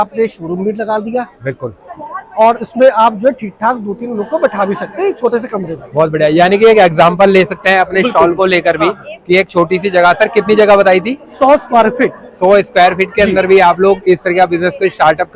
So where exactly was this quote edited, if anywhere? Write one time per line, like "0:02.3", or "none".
none